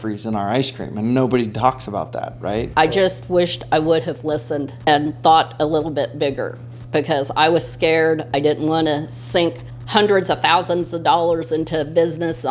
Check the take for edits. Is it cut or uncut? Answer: cut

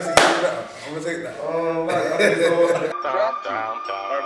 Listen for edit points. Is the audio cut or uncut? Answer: cut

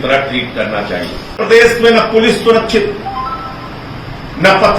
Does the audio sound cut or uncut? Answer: cut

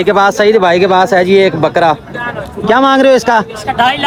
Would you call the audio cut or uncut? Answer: uncut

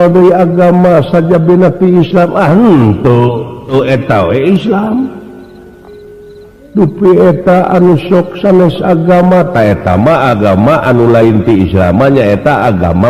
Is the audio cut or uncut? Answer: cut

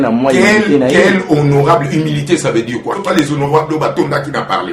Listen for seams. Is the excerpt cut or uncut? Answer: cut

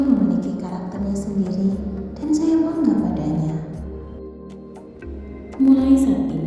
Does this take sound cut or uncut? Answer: cut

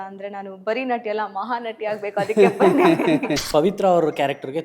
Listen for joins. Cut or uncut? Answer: cut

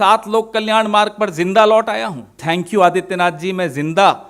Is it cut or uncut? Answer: cut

